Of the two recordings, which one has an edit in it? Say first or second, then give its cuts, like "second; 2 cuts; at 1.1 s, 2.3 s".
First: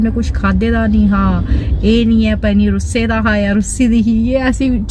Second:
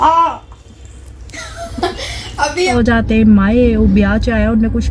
second; 1 cut; at 2.7 s